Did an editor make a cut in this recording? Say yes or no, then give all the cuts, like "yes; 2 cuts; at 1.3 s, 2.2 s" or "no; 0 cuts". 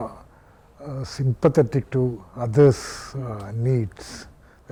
no; 0 cuts